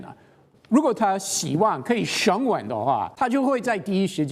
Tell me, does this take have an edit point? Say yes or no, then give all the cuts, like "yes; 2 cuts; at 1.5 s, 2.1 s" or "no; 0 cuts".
yes; 1 cut; at 3.1 s